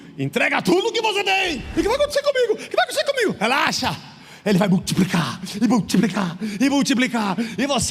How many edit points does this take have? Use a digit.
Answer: 1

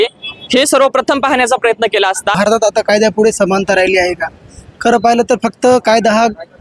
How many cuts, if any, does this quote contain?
1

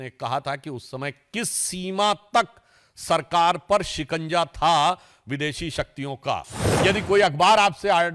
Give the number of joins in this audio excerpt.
1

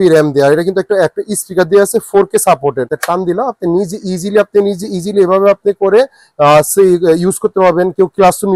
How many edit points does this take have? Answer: 1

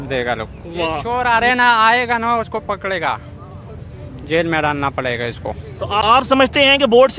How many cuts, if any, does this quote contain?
2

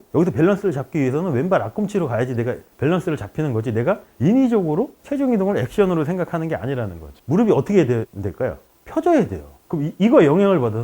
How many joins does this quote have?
1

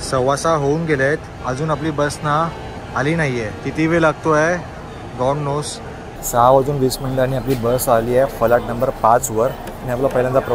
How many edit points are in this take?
3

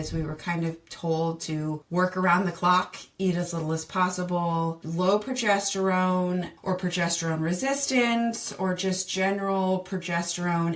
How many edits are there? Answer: 3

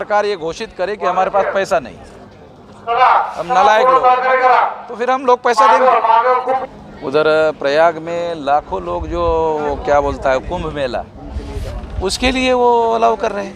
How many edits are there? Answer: 1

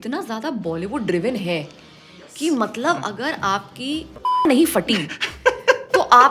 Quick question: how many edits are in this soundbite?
1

